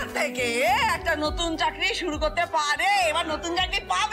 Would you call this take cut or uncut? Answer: uncut